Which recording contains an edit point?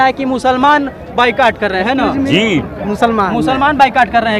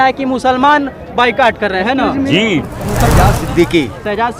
second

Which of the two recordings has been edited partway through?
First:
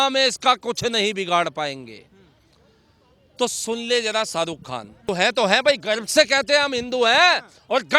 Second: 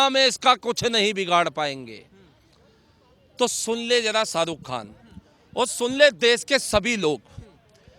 first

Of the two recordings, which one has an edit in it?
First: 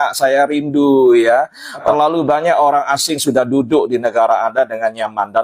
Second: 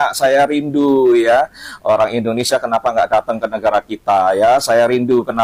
first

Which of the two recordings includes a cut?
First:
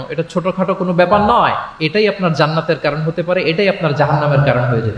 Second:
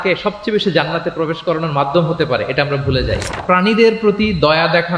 second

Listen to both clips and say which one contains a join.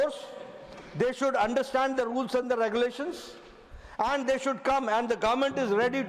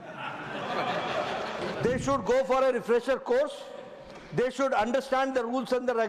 second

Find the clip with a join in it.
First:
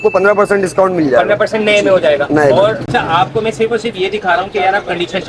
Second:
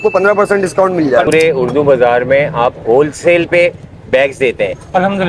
second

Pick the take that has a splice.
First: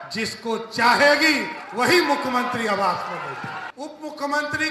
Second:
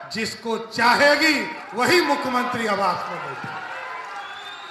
first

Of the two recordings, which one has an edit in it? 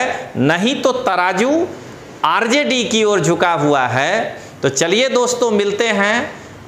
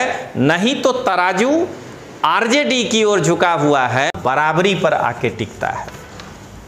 second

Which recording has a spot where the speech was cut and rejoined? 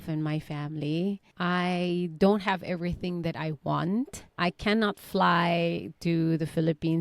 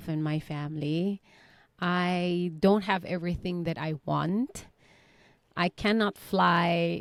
first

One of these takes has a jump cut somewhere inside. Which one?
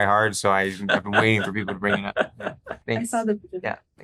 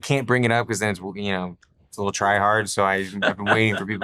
first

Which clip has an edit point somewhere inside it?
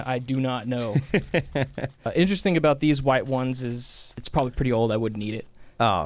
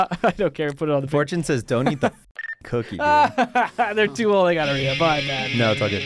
first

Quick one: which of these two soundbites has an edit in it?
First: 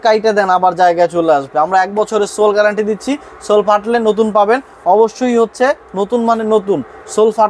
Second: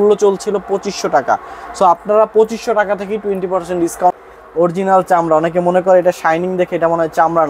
second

